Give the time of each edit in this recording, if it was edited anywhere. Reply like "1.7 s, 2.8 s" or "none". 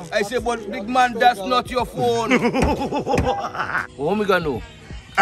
3.8 s